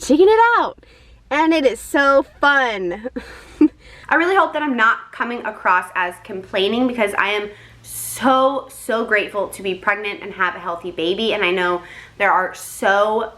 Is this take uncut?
no; 1 cut; at 4.0 s

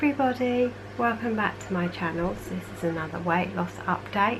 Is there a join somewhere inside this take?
yes; 1 cut; at 3.4 s

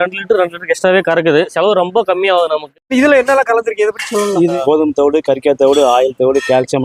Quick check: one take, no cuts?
no; 3 cuts; at 1.5 s, 2.8 s, 4.6 s

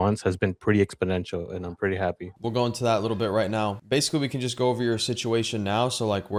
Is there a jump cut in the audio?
no; 0 cuts

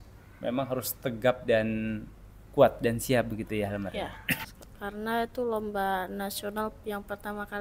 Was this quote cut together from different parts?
yes; 1 cut; at 4.6 s

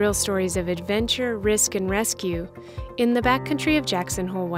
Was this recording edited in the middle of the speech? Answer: no; 0 cuts

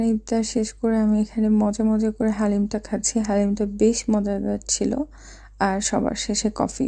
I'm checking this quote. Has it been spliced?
no; 0 cuts

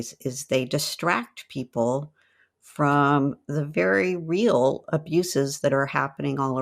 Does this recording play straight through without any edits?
yes; 0 cuts

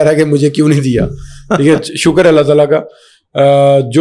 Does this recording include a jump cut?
no; 0 cuts

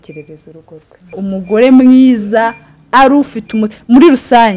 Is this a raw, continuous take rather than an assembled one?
no; 1 cut; at 1.1 s

